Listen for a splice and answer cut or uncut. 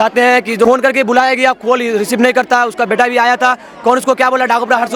uncut